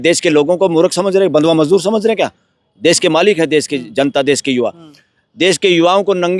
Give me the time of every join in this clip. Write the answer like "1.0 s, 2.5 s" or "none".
none